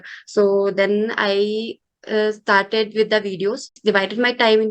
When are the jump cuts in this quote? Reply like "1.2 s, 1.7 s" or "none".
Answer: 3.7 s